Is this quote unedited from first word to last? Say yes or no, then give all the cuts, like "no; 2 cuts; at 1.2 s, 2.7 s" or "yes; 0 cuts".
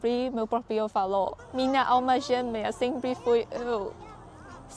no; 1 cut; at 1.4 s